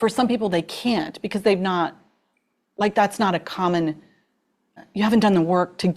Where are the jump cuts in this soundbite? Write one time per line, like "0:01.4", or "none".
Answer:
0:04.7